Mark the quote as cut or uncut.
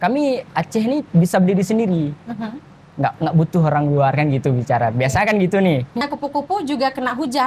cut